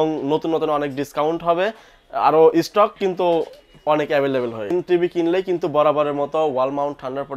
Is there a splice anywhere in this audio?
yes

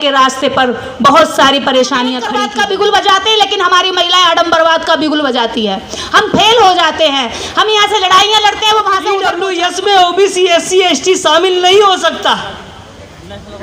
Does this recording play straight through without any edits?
no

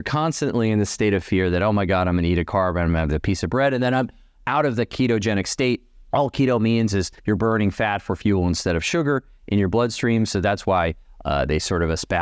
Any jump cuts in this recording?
no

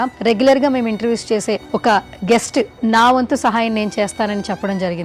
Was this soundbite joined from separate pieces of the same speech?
yes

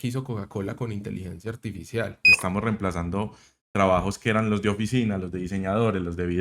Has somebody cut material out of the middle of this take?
yes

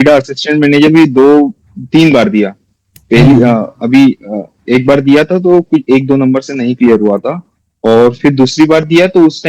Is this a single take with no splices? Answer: yes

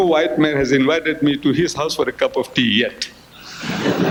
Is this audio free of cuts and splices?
yes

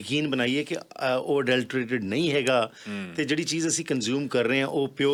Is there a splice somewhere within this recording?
no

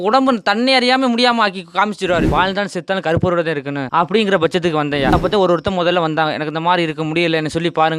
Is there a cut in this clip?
yes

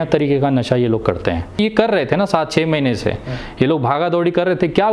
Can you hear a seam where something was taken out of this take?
yes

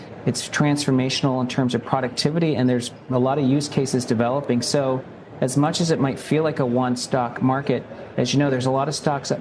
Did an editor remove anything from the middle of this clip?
no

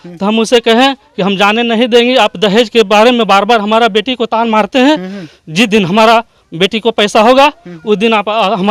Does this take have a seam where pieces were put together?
no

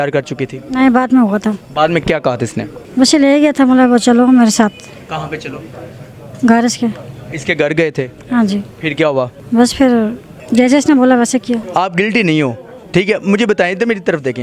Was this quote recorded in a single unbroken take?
no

